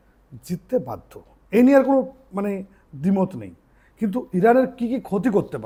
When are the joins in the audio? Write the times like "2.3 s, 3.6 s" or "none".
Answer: none

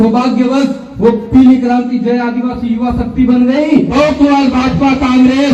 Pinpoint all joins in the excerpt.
3.9 s

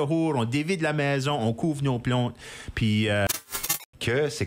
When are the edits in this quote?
3.4 s

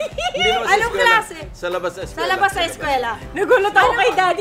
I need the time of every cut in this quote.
none

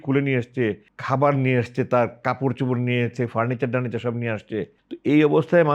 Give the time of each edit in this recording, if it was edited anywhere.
0.9 s, 4.8 s

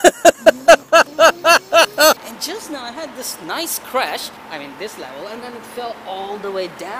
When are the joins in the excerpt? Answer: 2.2 s, 4.4 s

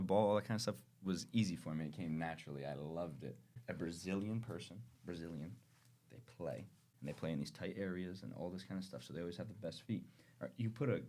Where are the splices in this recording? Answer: 3.6 s, 6.8 s

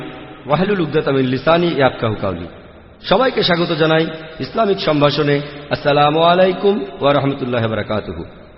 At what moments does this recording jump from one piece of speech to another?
none

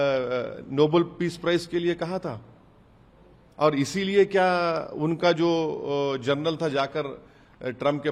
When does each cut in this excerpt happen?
none

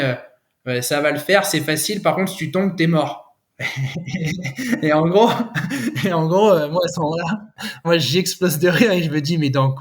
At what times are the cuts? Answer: 7.9 s

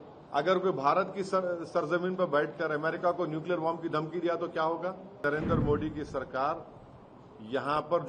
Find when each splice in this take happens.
5.2 s

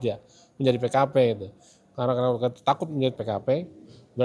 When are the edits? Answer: 3.2 s

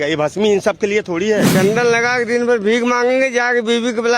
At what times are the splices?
1.5 s

